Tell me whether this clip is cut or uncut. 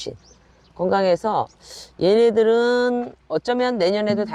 uncut